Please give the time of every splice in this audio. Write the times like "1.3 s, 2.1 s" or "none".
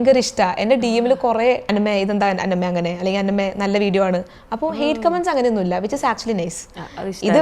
1.6 s